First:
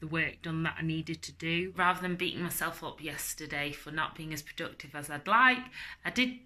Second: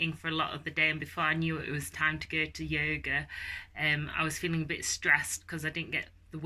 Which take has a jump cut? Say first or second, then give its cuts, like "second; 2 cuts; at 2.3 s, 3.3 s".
first; 1 cut; at 1.7 s